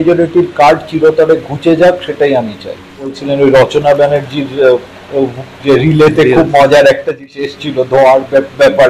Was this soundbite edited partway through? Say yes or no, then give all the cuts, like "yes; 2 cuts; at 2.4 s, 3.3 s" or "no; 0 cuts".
yes; 2 cuts; at 3.2 s, 7.3 s